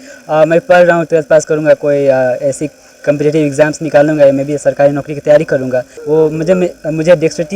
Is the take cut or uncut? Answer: cut